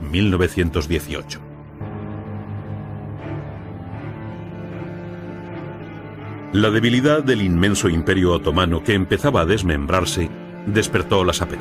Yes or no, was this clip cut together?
yes